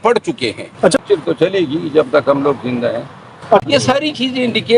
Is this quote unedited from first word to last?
no; 2 cuts; at 1.0 s, 3.6 s

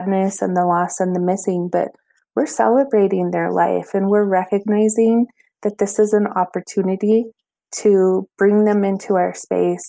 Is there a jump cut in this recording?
no; 0 cuts

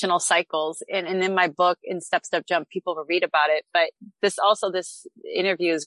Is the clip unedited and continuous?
yes; 0 cuts

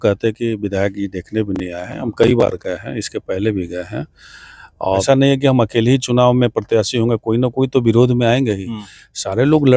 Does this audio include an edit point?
yes; 1 cut; at 5.0 s

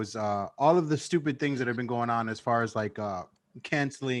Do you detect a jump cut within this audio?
no; 0 cuts

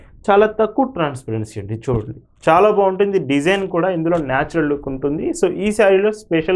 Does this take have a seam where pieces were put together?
no; 0 cuts

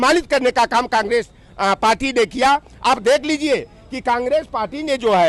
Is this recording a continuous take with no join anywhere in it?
yes; 0 cuts

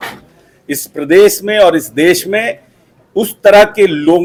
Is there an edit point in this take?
no; 0 cuts

